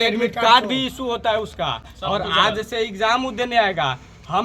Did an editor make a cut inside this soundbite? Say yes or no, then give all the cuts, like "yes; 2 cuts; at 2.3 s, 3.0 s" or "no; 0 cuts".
no; 0 cuts